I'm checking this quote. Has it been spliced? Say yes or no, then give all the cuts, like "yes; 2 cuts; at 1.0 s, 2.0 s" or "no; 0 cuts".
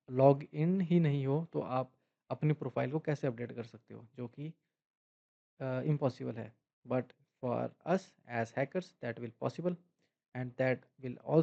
no; 0 cuts